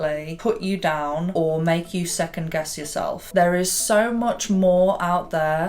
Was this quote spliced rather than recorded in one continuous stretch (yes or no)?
yes